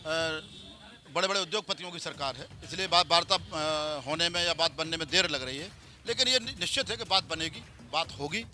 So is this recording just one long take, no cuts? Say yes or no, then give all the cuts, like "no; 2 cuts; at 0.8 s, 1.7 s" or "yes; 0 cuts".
yes; 0 cuts